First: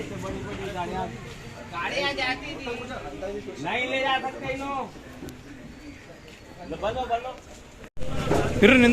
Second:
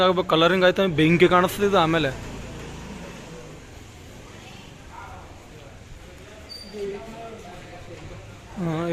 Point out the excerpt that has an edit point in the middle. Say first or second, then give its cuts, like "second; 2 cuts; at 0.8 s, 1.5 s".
first; 1 cut; at 8.0 s